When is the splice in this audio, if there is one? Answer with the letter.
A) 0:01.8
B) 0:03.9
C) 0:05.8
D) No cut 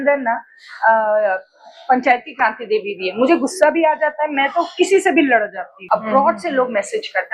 C